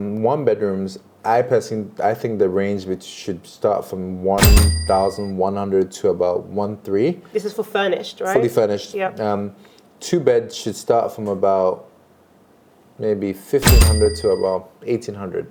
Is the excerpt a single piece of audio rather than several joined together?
yes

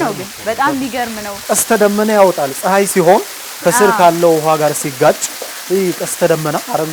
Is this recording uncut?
no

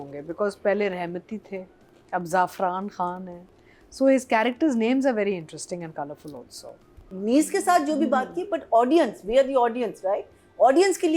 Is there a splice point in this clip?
yes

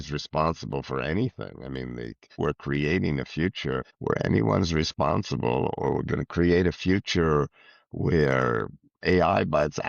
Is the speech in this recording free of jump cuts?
no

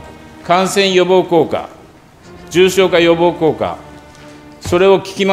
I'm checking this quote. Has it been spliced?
no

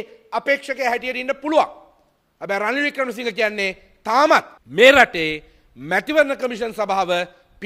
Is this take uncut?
no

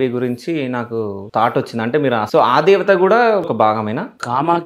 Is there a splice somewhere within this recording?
yes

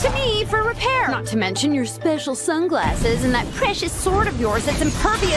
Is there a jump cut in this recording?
no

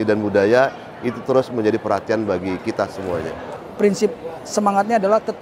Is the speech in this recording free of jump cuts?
no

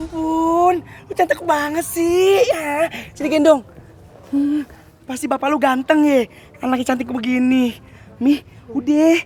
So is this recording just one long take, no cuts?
yes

